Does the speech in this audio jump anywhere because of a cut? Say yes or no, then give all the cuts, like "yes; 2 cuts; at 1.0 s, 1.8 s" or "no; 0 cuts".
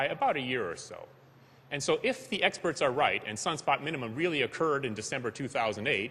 yes; 1 cut; at 3.4 s